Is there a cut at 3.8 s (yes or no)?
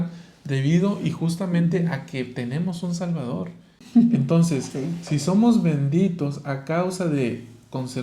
yes